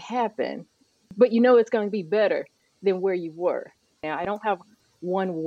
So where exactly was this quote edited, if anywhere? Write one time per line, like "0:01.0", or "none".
0:01.1
0:04.0